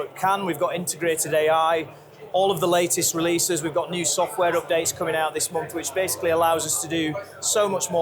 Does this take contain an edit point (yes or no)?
no